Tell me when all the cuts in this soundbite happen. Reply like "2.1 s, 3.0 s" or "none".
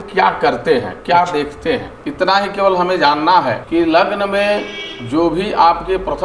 2.0 s, 3.6 s